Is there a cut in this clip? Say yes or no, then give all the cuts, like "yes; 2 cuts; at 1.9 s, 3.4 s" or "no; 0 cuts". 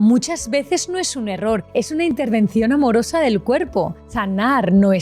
yes; 2 cuts; at 1.7 s, 4.1 s